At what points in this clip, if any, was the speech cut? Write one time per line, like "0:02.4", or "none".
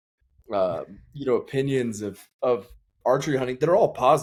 none

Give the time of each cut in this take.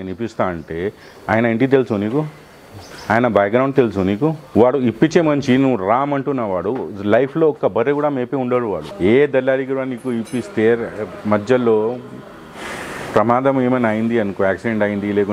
0:04.4
0:08.9

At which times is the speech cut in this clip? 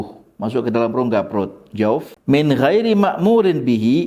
0:02.1

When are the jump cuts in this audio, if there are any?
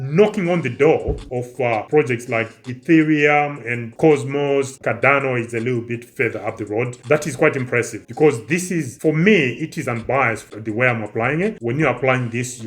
0:04.7
0:10.5

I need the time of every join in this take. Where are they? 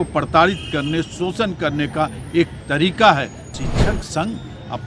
0:03.6

